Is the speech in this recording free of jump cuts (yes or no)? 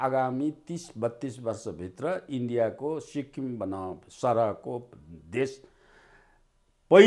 yes